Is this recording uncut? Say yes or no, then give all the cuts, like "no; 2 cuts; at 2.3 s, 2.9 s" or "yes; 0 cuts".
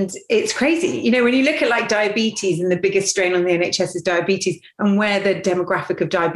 yes; 0 cuts